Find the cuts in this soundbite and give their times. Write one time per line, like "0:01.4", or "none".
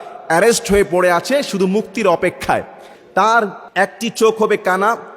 0:03.0
0:03.6